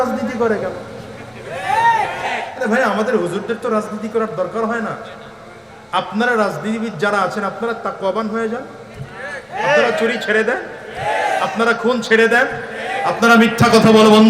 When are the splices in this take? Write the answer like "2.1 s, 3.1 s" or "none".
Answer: 2.3 s